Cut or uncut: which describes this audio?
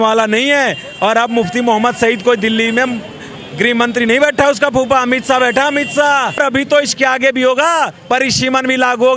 cut